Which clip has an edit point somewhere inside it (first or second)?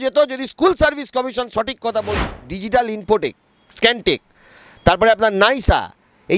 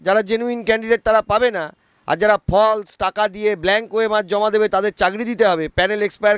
first